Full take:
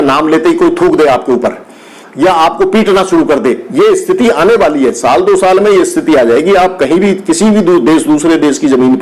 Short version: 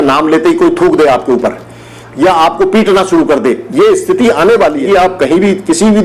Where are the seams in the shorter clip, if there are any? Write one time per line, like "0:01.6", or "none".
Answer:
0:04.8

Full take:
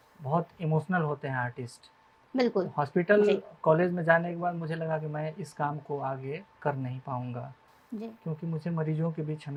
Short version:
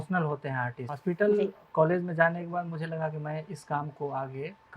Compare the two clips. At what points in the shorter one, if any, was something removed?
0:00.9

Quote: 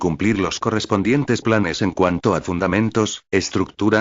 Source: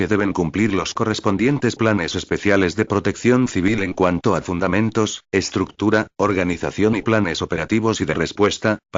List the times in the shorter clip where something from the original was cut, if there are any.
0:01.9

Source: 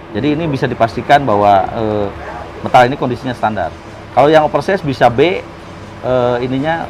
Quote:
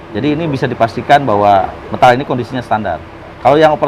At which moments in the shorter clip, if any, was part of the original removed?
0:01.7

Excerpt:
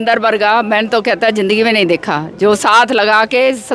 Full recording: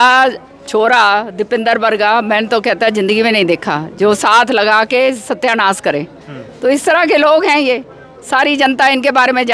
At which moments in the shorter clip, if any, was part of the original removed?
none

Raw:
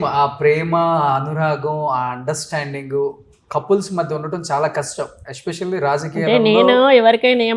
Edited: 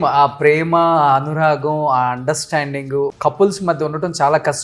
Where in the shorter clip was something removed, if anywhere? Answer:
0:03.2

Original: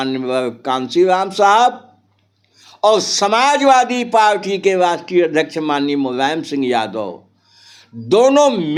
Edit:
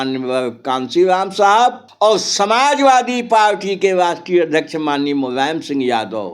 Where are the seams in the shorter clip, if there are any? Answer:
0:01.8

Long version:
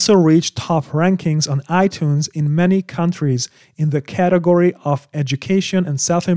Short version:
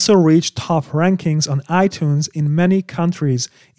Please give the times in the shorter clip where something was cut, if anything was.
none

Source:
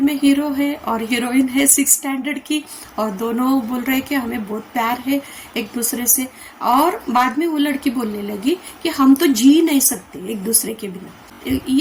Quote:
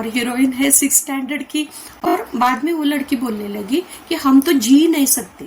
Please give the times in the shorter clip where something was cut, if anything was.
0:02.1

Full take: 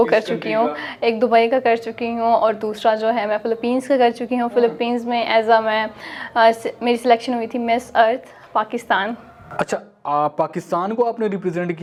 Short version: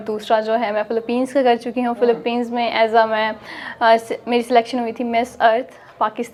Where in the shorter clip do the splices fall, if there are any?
none

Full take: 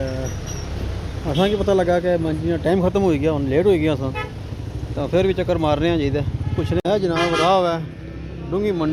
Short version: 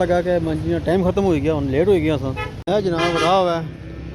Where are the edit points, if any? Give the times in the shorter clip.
0:02.6

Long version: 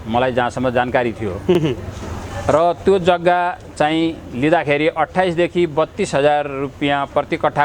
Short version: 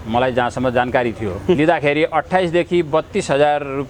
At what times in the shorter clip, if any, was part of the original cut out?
0:01.5

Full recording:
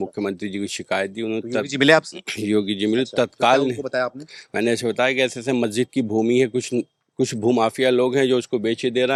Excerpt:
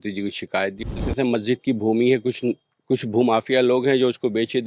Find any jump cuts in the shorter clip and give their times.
0:01.0

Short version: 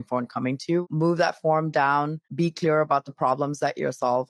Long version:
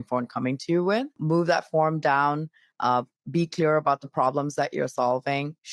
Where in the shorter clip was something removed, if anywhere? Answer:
0:00.8
0:02.2

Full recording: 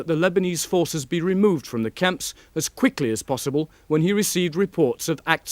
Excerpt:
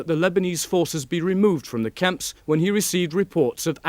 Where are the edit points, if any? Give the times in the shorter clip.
0:02.3

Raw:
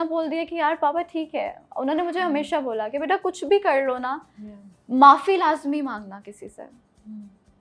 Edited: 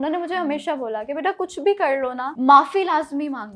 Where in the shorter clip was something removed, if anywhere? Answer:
0:02.3

